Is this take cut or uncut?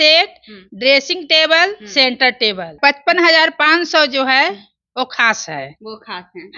cut